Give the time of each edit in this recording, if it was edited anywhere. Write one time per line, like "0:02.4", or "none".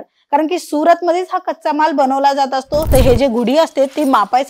0:02.9